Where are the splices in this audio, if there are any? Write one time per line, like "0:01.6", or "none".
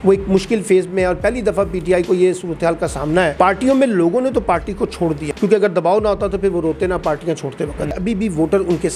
0:03.3
0:05.2
0:07.9